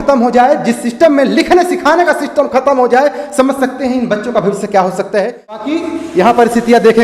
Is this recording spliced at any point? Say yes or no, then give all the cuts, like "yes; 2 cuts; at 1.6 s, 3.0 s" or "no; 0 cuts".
yes; 1 cut; at 5.6 s